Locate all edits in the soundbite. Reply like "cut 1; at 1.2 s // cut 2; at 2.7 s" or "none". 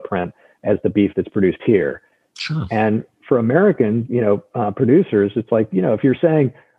none